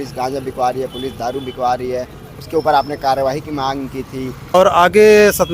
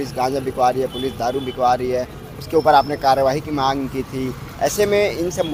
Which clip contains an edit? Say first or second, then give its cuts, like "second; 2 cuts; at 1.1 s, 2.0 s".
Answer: first; 1 cut; at 4.5 s